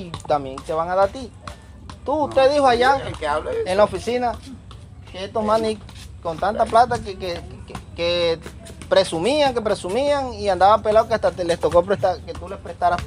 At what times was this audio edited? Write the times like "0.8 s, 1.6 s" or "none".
none